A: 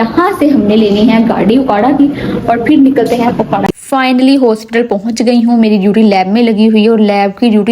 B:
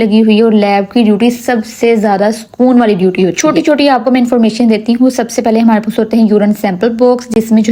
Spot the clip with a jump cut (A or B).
A